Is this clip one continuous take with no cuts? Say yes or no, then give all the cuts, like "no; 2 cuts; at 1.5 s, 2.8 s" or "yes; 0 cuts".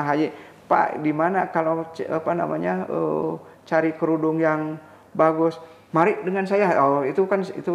yes; 0 cuts